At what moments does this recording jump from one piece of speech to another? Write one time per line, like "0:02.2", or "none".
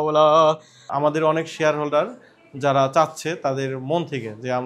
0:00.9